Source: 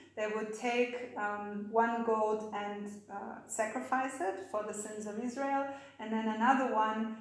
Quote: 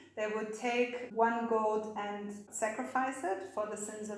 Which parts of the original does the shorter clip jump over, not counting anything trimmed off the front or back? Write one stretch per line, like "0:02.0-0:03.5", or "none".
0:01.1-0:01.6
0:03.0-0:03.4